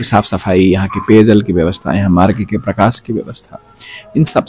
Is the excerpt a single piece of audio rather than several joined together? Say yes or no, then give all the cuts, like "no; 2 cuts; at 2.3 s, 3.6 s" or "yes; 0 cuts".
yes; 0 cuts